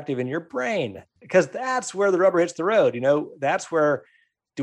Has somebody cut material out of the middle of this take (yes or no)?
yes